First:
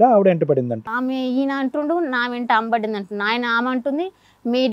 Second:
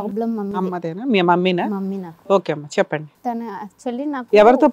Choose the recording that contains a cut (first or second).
first